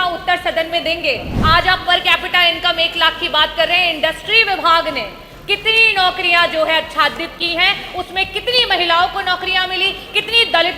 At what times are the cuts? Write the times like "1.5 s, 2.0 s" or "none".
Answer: 1.3 s